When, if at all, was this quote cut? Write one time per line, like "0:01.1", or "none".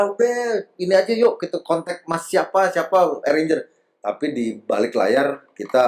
none

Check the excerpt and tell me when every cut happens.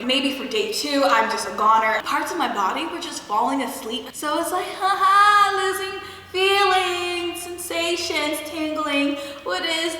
0:02.0
0:04.1

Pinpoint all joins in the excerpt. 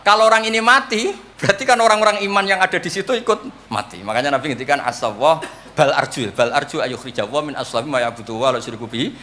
0:01.3
0:03.6

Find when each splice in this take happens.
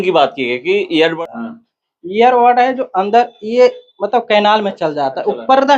0:01.1

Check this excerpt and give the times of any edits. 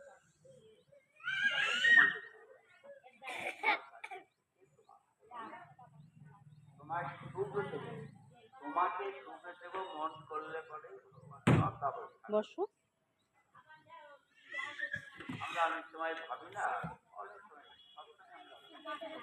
0:17.4

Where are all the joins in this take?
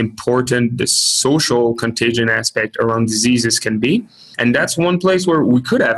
0:04.2

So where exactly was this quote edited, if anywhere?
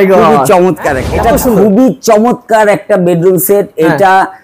0:01.0

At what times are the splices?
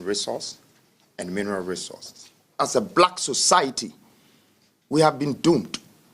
0:02.5

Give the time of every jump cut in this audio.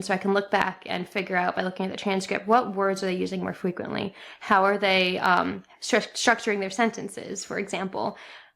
none

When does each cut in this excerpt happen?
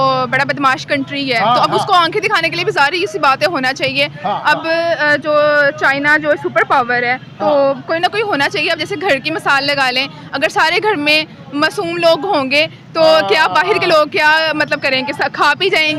none

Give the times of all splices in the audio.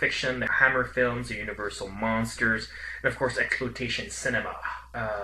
none

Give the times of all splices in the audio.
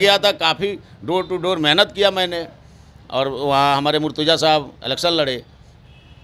none

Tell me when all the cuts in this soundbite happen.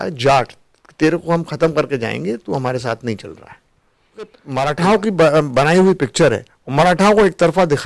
0:04.4

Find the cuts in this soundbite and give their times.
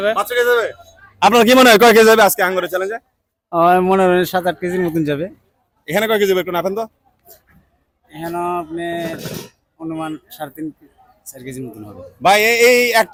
none

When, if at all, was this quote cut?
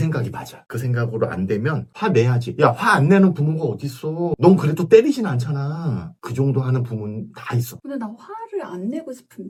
none

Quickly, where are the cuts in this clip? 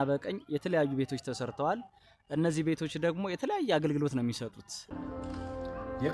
0:04.8

